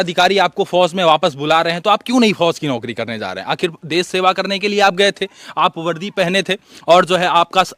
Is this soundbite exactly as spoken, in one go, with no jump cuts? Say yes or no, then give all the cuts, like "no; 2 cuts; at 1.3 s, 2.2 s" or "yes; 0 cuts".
yes; 0 cuts